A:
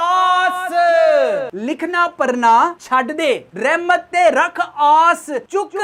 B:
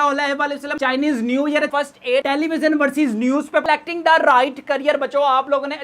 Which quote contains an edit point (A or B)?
B